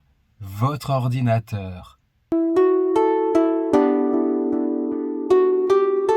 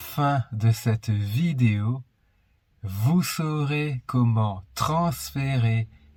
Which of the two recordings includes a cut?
first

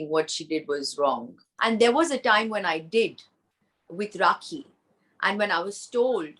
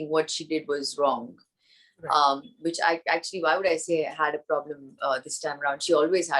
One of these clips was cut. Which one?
first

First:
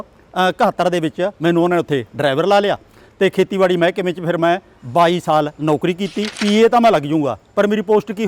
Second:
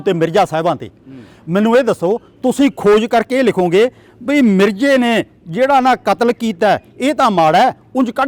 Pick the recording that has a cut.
first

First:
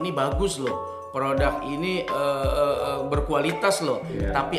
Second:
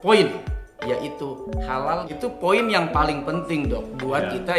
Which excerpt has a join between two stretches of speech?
second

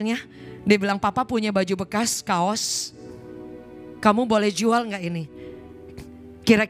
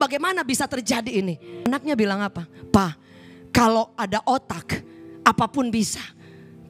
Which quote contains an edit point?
second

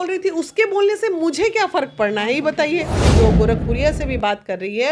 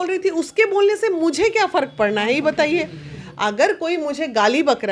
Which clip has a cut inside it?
first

